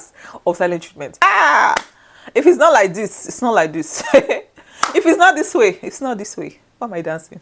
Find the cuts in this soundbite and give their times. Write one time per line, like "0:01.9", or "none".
0:01.2

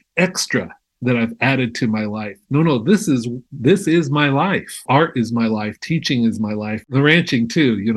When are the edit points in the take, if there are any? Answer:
0:04.8
0:06.9

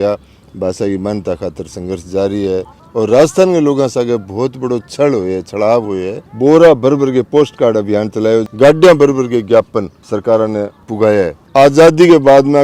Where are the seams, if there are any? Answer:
0:02.8
0:06.2
0:08.5
0:11.4

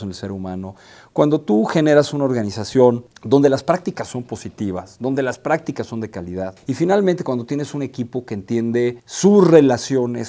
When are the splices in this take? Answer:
0:03.1
0:06.6
0:09.1

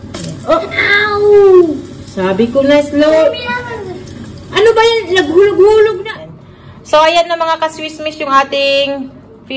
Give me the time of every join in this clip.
0:06.1

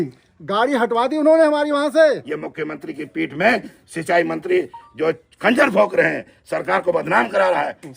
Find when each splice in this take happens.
0:02.3

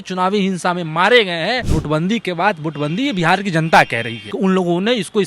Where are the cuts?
0:01.7
0:04.2

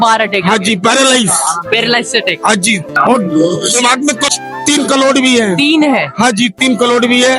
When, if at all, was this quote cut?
0:03.0
0:04.3

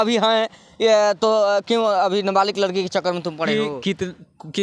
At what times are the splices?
none

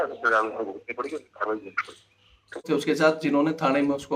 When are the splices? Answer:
0:02.7

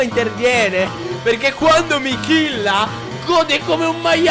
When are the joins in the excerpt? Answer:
0:01.0

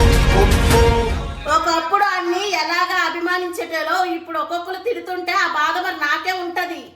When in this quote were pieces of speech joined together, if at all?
0:01.3

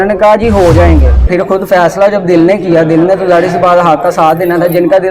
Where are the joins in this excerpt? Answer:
0:01.3

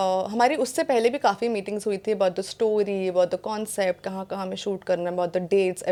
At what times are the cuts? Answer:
none

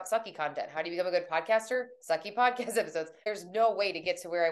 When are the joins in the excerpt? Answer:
0:03.2

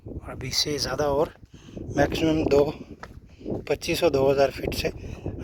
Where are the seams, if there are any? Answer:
none

